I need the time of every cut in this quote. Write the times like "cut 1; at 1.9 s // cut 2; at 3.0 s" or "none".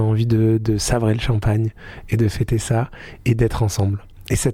none